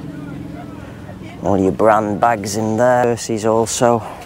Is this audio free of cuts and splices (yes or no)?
no